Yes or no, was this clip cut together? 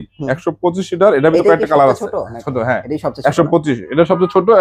no